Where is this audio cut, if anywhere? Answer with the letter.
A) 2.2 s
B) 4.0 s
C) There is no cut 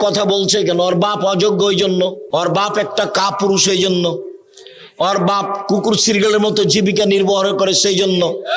A